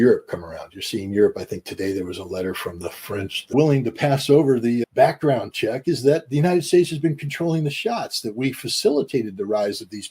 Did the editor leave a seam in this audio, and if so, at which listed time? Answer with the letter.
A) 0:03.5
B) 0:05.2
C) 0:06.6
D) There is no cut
A